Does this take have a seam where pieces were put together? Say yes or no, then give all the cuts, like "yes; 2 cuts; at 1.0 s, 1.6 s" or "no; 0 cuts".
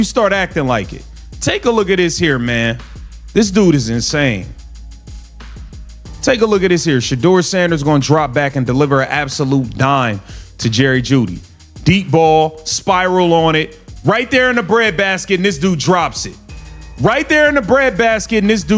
yes; 2 cuts; at 4.6 s, 6.2 s